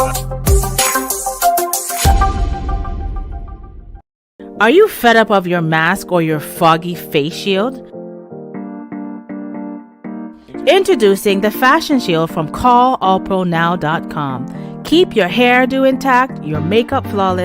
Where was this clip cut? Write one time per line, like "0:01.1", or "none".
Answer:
0:04.4